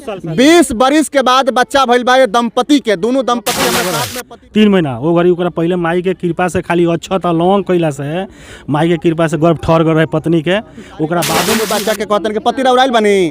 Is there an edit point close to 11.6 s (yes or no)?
yes